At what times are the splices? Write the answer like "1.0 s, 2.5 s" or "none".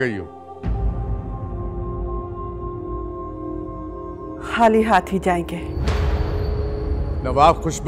none